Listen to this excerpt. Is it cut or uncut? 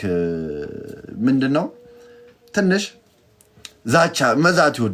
uncut